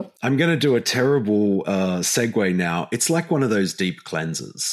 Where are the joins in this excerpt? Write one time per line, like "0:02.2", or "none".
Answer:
none